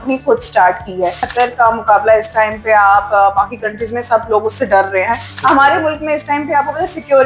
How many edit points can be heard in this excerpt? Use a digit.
2